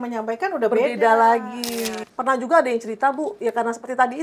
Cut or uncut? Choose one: cut